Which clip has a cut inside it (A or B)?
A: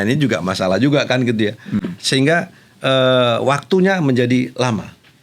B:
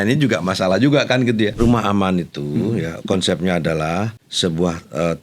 B